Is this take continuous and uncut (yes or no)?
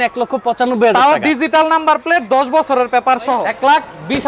no